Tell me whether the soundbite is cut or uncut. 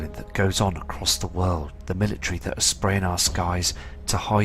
cut